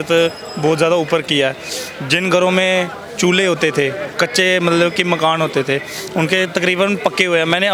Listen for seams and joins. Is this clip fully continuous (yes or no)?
yes